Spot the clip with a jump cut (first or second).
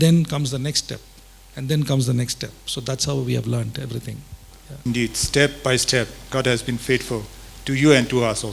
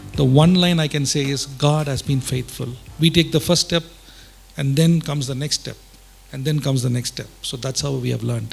first